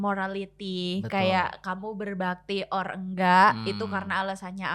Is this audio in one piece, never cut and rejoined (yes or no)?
yes